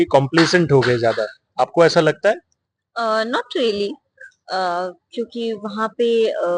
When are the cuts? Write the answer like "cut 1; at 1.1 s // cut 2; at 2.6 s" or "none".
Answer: none